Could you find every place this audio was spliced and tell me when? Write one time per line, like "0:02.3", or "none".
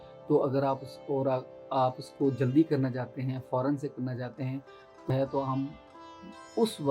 0:05.1